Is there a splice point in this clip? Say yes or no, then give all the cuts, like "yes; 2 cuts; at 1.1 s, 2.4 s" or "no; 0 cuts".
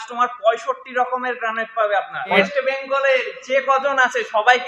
yes; 1 cut; at 2.4 s